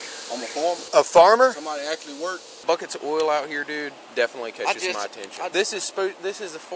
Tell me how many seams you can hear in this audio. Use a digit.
3